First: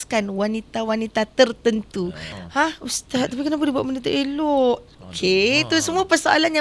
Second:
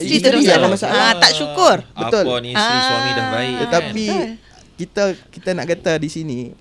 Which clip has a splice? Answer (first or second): first